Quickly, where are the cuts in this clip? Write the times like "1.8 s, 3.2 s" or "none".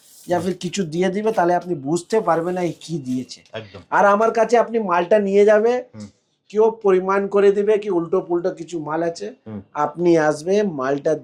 none